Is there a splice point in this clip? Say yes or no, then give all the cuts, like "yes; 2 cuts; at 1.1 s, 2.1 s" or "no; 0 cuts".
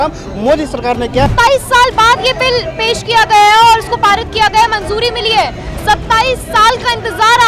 no; 0 cuts